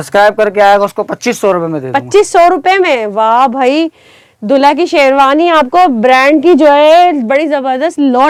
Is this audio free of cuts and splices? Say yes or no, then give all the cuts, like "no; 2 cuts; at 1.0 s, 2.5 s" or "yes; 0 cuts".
yes; 0 cuts